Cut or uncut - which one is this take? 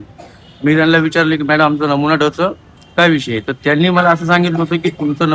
uncut